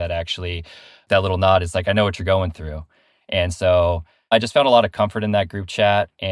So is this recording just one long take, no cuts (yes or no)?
no